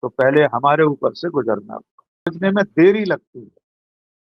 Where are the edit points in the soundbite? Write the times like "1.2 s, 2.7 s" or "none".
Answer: 2.3 s